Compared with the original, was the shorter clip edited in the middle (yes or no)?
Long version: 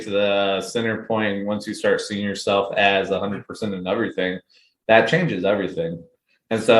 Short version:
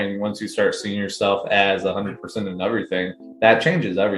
yes